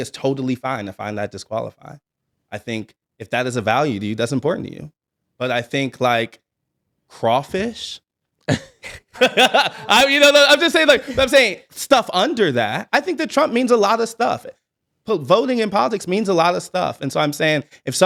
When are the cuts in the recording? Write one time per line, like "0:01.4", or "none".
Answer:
none

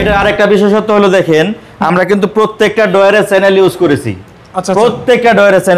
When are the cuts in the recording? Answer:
none

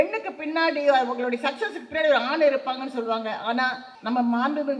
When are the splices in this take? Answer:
0:03.9

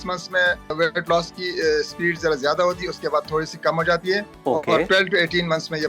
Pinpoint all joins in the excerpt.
0:00.7
0:04.3

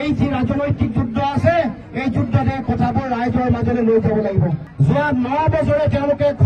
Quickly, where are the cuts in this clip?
0:04.7

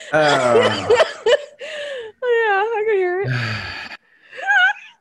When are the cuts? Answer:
none

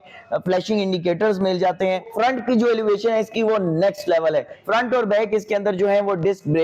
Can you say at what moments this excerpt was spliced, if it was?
0:02.1
0:04.6

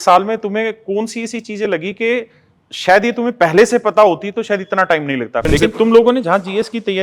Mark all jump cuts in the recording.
0:05.4

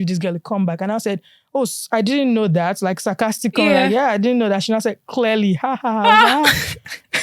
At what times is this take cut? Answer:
none

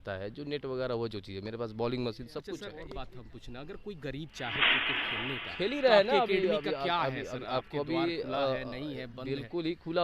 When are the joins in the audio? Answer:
0:02.7

